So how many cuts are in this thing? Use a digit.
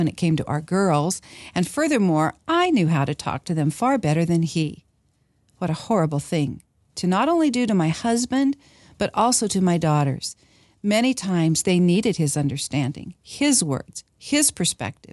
0